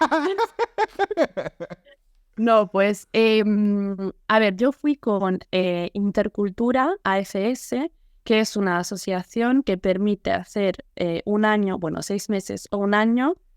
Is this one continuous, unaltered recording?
yes; 0 cuts

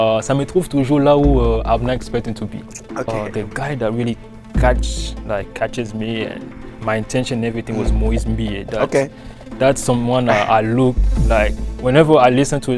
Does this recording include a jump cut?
yes; 1 cut; at 3.1 s

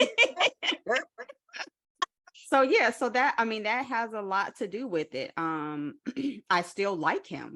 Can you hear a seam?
yes; 1 cut; at 2.3 s

